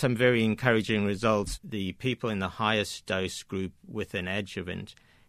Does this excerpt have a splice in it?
yes; 1 cut; at 1.6 s

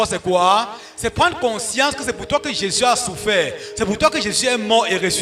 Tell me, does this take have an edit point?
no; 0 cuts

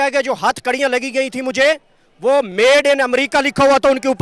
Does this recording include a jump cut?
no; 0 cuts

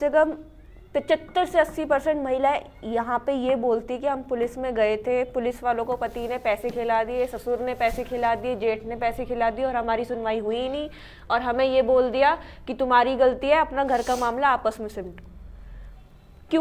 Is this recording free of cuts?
yes; 0 cuts

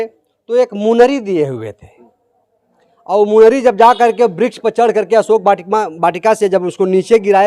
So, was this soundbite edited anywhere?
no; 0 cuts

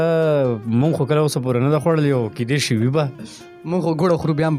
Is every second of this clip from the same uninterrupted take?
yes; 0 cuts

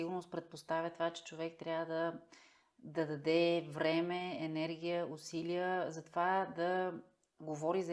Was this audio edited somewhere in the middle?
no; 0 cuts

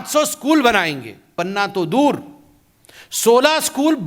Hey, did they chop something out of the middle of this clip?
yes; 1 cut; at 1.4 s

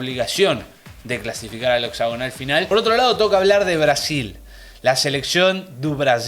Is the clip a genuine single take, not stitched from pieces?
no; 1 cut; at 2.7 s

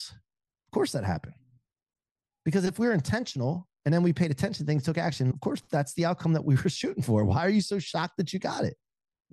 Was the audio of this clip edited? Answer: yes; 1 cut; at 5.3 s

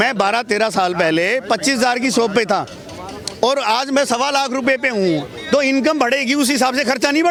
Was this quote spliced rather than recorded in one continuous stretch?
no; 0 cuts

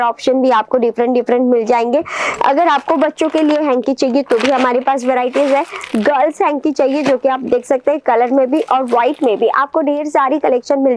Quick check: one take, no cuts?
yes; 0 cuts

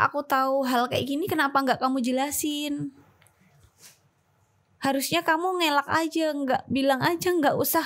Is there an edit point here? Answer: no; 0 cuts

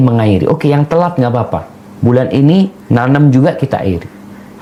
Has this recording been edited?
no; 0 cuts

